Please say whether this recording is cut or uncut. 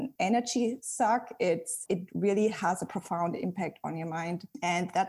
uncut